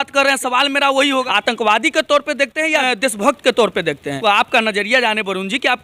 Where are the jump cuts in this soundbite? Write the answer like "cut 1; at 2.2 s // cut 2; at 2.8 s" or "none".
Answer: cut 1; at 1.2 s // cut 2; at 2.8 s // cut 3; at 4.1 s